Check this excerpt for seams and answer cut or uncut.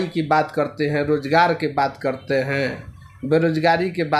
uncut